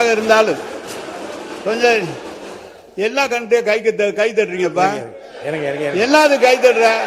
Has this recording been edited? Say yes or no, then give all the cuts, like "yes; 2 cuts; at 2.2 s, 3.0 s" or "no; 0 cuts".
no; 0 cuts